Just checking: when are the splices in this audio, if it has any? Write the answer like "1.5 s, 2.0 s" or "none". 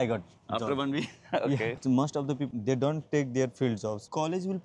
1.8 s